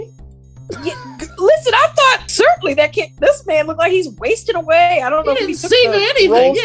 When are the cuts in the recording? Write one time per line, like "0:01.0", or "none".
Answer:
0:02.2